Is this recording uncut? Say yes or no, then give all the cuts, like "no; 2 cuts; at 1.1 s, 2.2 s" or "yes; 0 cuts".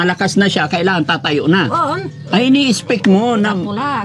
yes; 0 cuts